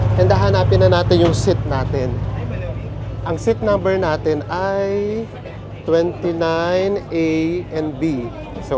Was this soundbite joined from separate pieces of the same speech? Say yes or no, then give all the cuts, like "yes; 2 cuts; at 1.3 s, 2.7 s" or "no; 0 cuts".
no; 0 cuts